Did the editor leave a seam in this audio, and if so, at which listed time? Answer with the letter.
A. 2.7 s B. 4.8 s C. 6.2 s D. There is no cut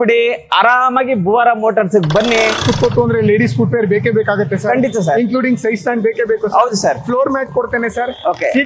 A